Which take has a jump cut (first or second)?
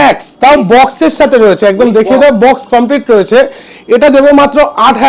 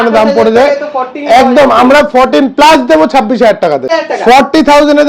second